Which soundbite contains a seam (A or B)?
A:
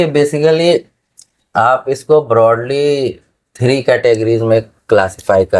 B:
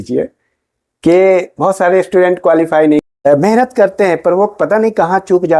B